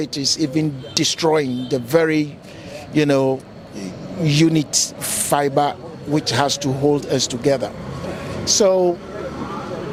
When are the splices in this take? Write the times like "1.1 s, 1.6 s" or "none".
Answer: none